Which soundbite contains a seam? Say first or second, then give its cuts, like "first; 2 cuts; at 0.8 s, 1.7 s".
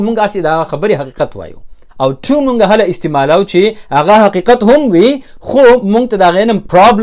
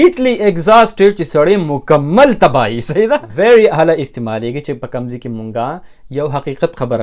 second; 1 cut; at 3.3 s